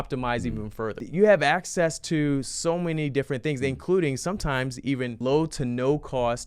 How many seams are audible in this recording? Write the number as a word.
two